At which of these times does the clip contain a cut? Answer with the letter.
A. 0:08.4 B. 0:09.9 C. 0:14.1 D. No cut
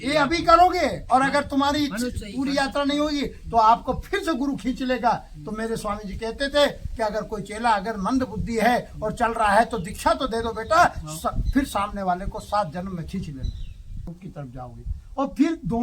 C